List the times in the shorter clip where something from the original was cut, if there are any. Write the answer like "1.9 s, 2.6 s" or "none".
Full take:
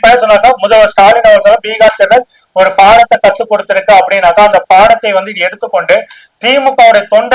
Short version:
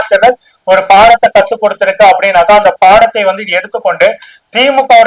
none